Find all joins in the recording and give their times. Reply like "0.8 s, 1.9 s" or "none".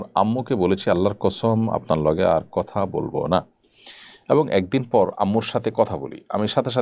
none